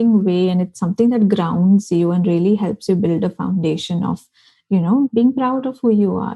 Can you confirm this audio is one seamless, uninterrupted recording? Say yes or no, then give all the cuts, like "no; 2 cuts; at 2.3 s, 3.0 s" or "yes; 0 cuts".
no; 1 cut; at 5.1 s